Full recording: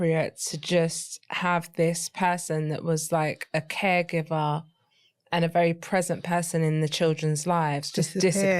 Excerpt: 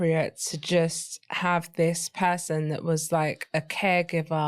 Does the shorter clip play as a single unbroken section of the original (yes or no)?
yes